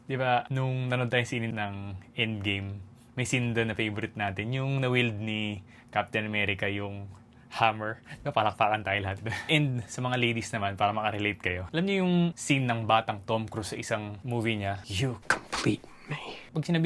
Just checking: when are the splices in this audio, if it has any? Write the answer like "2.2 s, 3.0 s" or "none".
9.3 s